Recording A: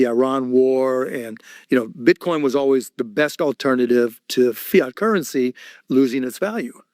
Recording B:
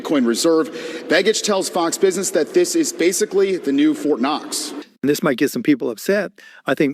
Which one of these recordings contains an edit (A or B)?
B